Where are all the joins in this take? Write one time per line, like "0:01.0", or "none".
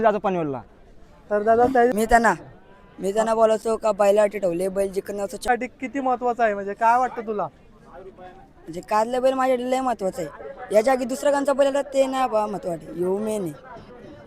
0:01.9
0:05.5